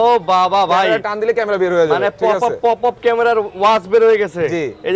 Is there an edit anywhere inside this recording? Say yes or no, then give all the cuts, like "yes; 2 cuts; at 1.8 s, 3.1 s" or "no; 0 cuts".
no; 0 cuts